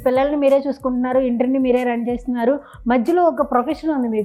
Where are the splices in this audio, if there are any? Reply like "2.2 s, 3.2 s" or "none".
none